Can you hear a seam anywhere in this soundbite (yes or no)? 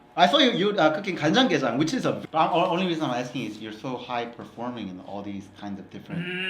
yes